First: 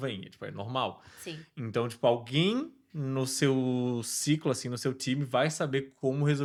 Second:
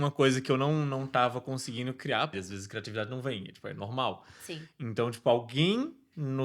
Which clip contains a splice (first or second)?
second